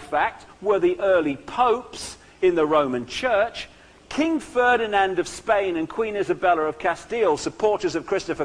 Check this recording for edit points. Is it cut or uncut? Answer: cut